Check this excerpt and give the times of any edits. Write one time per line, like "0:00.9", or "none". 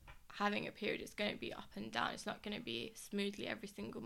none